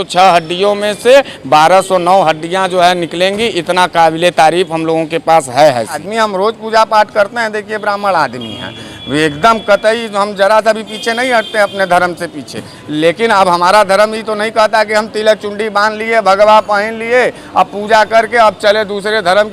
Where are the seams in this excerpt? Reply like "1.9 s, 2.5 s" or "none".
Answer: 6.1 s